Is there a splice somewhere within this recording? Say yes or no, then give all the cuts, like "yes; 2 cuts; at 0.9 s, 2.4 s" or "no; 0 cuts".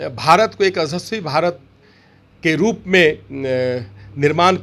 no; 0 cuts